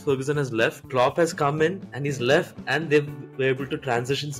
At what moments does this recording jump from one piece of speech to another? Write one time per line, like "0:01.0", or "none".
none